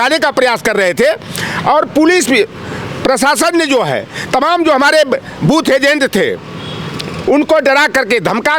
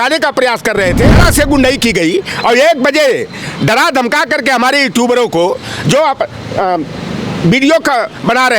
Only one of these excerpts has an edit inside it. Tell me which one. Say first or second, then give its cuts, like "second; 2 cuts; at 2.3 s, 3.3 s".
second; 1 cut; at 1.2 s